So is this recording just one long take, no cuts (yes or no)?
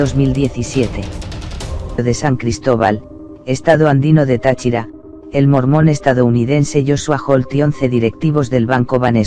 yes